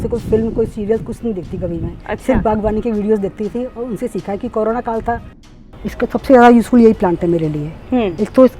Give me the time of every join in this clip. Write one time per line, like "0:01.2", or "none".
0:05.6